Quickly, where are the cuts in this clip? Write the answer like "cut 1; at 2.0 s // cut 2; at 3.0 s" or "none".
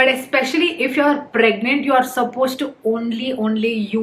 none